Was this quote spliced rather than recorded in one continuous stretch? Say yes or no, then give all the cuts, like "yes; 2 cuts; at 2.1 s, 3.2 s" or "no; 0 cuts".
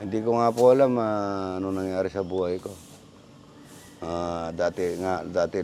no; 0 cuts